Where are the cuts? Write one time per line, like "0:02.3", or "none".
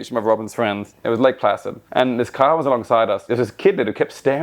0:00.9
0:01.8
0:03.3